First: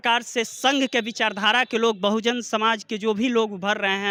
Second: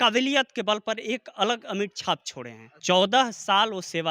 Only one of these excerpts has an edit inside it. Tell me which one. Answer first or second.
second